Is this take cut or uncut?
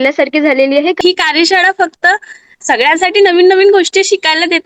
cut